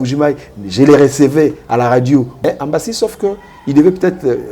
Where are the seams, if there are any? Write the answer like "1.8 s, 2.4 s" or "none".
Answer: 2.4 s